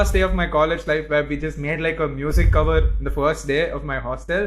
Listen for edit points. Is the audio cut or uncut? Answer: uncut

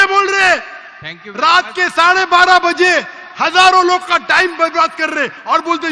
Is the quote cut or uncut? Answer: uncut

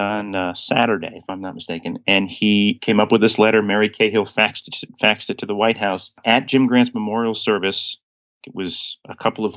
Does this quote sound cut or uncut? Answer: cut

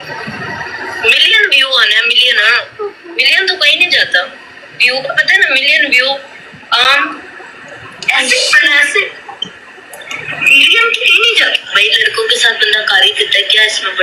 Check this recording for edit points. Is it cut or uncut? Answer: uncut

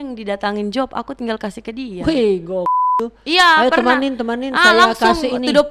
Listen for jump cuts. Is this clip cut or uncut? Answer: cut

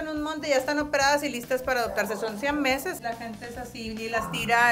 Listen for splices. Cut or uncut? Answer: cut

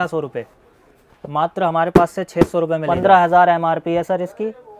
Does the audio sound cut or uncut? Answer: cut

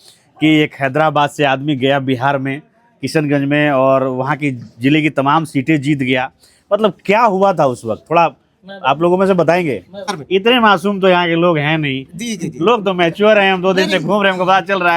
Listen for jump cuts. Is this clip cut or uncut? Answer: cut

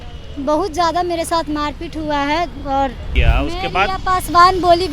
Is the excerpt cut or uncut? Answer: cut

